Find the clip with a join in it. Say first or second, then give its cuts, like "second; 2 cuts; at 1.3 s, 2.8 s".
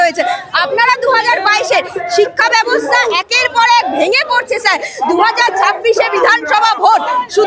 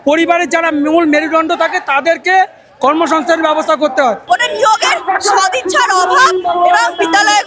second; 1 cut; at 4.2 s